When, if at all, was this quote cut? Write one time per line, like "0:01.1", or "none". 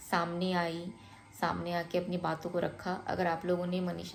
none